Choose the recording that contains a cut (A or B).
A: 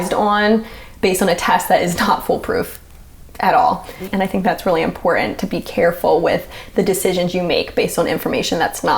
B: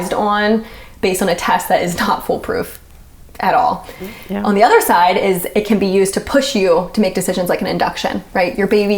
A